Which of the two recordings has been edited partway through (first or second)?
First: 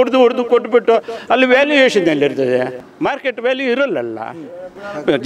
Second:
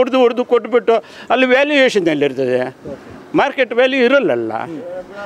first